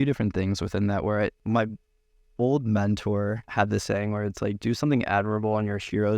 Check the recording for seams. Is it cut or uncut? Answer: cut